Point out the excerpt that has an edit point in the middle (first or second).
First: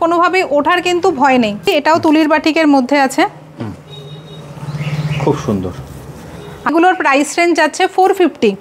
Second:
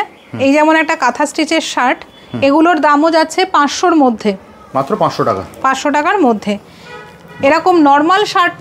first